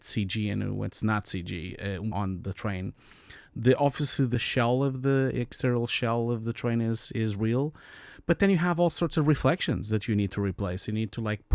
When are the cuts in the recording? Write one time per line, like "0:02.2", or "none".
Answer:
0:02.0
0:04.3